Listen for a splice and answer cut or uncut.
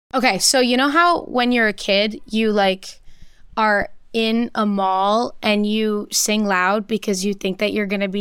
uncut